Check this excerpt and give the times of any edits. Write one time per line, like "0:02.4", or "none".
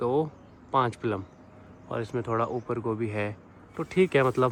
none

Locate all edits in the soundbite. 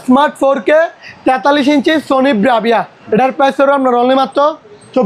0:02.9

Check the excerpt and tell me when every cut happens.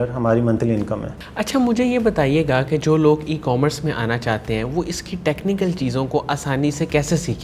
none

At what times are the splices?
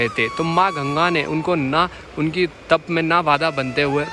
none

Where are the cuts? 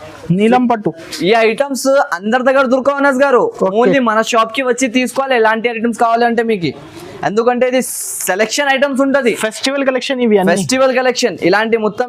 none

